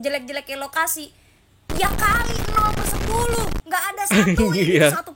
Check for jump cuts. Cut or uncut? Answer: uncut